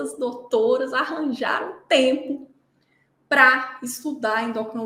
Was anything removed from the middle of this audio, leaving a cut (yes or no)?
no